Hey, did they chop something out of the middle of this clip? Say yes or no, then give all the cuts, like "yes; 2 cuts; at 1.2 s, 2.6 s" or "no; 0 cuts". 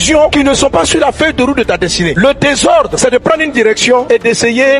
no; 0 cuts